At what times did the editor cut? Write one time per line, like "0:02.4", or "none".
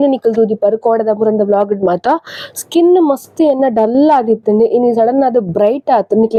none

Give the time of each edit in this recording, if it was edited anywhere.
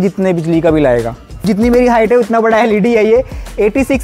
0:01.4

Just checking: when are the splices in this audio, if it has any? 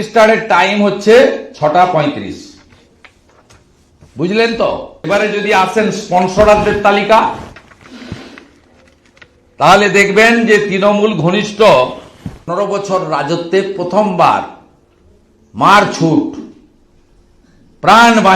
0:05.1
0:12.5

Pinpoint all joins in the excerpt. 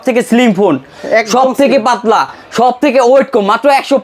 none

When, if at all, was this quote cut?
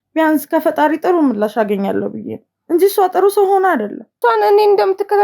0:04.2

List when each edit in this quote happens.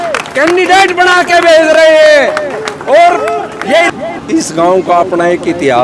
0:03.9

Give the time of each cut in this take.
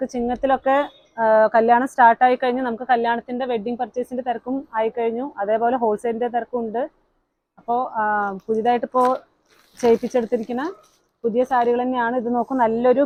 none

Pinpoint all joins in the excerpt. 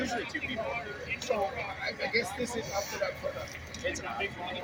none

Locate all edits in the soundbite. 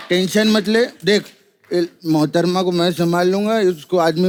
none

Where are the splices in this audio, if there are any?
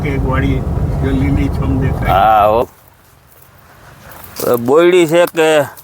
0:02.6

